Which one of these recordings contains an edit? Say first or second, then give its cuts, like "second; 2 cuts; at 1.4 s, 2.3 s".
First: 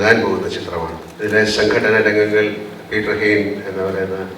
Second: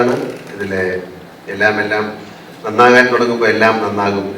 first; 1 cut; at 1.0 s